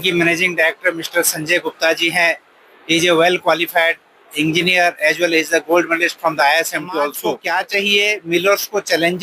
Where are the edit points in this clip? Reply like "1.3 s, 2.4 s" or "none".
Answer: 7.4 s